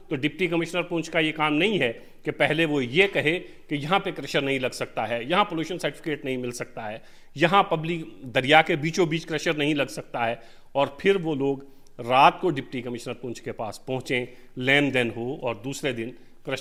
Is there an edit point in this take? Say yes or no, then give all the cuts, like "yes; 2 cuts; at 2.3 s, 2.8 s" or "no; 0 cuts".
no; 0 cuts